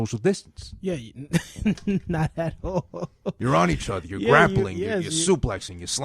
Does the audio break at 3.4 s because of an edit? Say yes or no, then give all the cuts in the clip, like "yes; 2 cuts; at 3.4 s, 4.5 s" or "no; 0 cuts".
yes; 1 cut; at 3.4 s